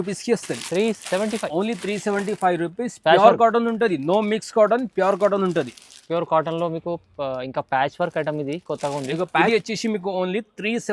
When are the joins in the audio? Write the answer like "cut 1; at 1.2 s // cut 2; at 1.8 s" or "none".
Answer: cut 1; at 9.5 s